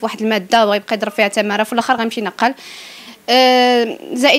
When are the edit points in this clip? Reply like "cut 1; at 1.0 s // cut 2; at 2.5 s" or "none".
none